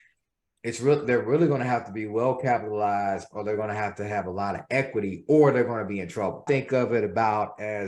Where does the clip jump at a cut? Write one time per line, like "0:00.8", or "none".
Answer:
0:06.4

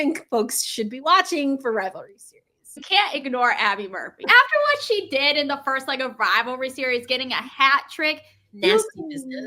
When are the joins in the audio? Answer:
0:02.8
0:04.2

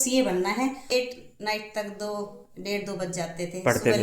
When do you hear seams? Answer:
0:00.9

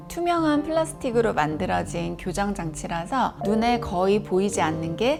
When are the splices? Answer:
none

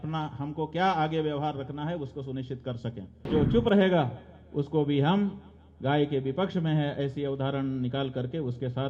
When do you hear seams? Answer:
0:03.3

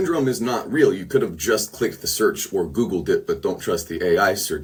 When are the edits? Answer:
none

